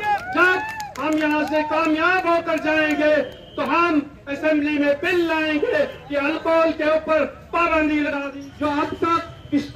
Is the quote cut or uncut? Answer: cut